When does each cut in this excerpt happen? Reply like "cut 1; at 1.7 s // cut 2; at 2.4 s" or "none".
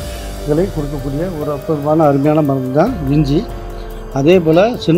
none